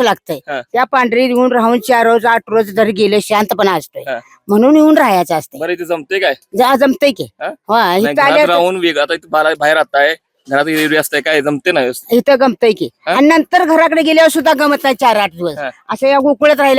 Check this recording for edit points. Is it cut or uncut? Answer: uncut